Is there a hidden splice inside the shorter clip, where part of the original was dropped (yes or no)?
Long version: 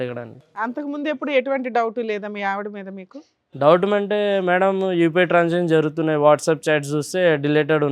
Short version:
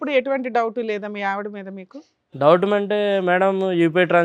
no